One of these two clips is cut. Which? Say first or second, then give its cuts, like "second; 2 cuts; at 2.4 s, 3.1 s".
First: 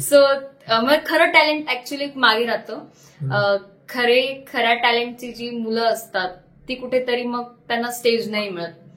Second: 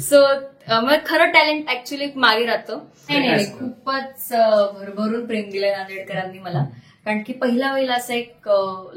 second; 1 cut; at 3.1 s